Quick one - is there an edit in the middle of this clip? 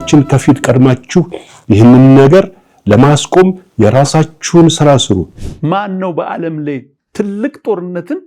yes; 1 cut; at 5.3 s

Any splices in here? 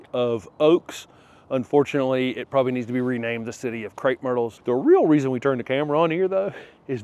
yes; 1 cut; at 4.5 s

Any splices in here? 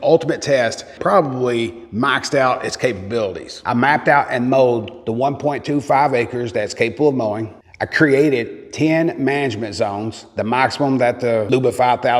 no; 0 cuts

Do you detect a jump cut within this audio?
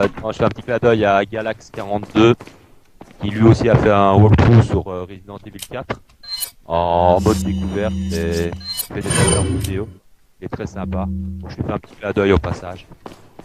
yes; 1 cut; at 9.1 s

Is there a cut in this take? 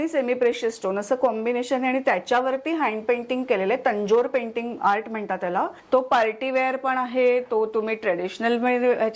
yes; 1 cut; at 5.8 s

